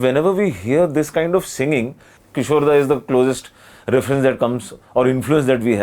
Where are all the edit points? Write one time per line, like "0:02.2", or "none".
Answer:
0:02.2